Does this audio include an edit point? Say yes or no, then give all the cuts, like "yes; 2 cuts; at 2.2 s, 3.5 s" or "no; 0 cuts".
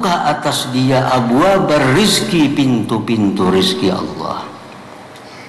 no; 0 cuts